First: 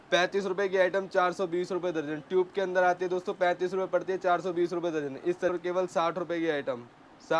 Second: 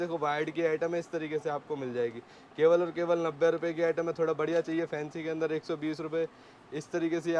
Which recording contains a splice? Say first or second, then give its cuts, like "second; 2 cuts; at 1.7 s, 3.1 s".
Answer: first; 1 cut; at 5.5 s